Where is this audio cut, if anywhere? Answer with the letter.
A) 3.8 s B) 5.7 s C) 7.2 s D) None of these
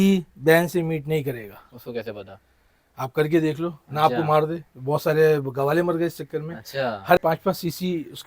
C